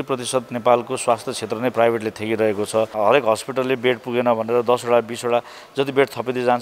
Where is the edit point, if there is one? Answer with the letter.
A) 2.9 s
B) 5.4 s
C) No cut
A